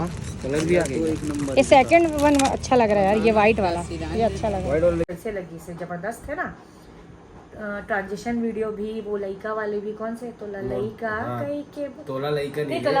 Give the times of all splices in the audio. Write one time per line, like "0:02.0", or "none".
0:05.1